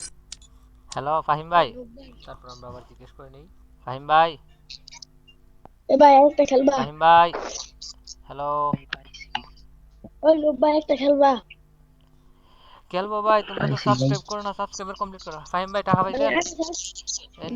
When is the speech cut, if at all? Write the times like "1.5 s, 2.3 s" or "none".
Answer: 1.2 s